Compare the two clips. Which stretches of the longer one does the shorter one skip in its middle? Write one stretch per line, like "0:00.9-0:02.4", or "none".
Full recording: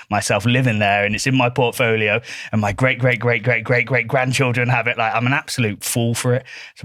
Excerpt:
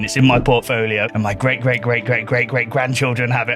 0:02.2-0:02.5

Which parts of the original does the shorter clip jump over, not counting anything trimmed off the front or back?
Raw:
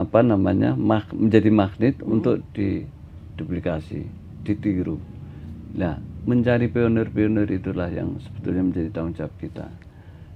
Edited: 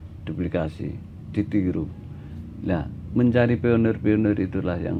none

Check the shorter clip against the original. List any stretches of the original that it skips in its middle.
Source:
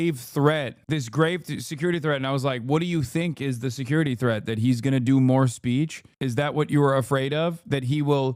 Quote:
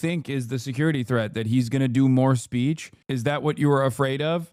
none

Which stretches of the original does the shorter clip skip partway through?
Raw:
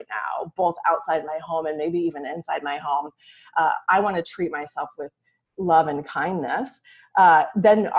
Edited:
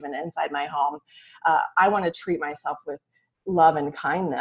none

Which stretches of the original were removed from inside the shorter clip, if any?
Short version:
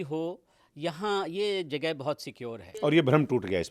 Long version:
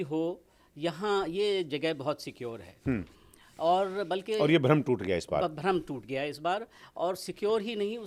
0:02.8-0:04.4

